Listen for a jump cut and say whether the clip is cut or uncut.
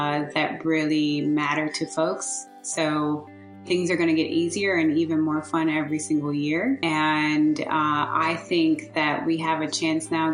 cut